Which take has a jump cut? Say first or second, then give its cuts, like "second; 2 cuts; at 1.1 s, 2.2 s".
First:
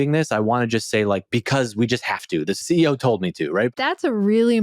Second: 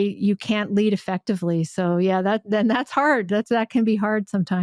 first; 2 cuts; at 2.6 s, 3.7 s